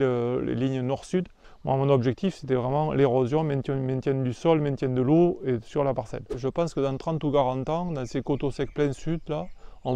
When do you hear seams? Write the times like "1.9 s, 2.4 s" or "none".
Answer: 1.5 s, 6.3 s